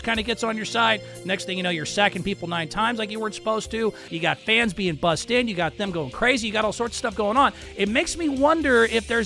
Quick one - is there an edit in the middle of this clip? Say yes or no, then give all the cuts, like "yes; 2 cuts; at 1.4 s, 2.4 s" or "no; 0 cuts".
yes; 1 cut; at 4.1 s